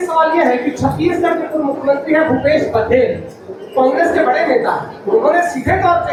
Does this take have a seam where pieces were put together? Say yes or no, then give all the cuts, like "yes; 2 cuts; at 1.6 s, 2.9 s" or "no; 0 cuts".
no; 0 cuts